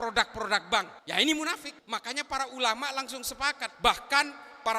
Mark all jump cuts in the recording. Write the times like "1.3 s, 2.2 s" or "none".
1.0 s, 1.7 s, 3.7 s